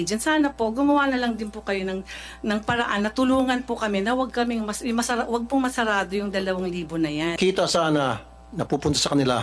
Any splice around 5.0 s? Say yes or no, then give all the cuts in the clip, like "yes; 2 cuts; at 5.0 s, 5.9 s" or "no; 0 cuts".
no; 1 cut; at 7.4 s